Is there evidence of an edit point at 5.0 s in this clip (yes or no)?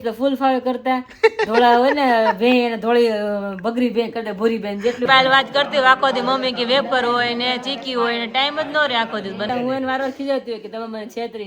yes